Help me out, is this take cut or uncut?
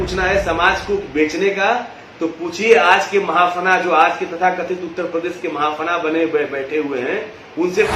uncut